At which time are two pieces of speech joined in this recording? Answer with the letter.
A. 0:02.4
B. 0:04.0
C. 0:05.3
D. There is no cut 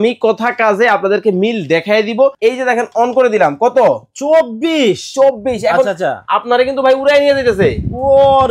A